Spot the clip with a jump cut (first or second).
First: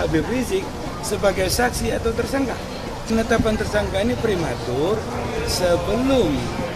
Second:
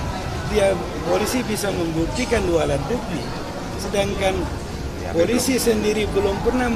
first